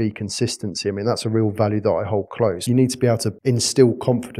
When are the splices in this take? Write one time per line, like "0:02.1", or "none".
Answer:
0:02.6
0:03.4